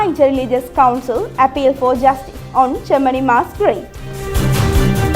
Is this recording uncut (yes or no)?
no